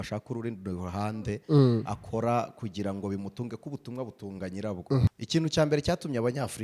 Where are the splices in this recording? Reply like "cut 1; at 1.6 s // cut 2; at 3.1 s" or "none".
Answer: cut 1; at 5.1 s